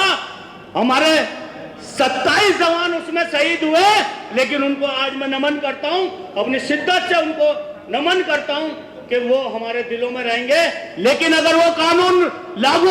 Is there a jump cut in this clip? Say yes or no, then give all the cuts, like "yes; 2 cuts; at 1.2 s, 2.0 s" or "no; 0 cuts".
no; 0 cuts